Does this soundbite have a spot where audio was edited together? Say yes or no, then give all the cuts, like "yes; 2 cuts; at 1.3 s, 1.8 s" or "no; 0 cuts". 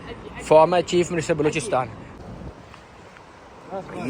yes; 1 cut; at 2.0 s